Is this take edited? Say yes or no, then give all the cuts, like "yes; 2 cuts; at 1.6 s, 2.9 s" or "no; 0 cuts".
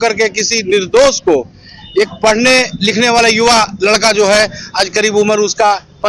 no; 0 cuts